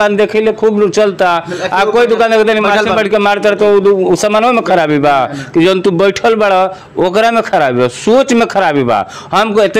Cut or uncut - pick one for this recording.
uncut